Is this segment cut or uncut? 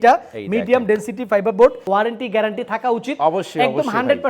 cut